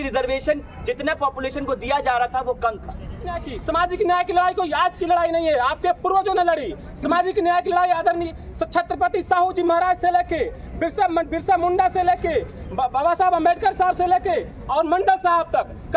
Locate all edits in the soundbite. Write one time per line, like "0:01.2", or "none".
0:03.5